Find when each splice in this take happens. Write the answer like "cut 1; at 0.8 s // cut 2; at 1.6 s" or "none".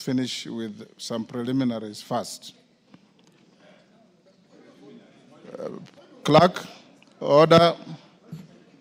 none